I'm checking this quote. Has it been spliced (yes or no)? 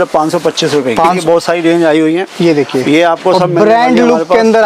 yes